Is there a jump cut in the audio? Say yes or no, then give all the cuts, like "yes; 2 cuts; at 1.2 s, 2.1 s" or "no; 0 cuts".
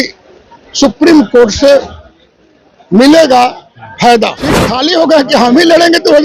yes; 1 cut; at 4.7 s